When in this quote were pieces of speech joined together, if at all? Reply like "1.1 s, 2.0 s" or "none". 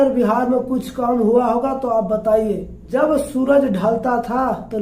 2.7 s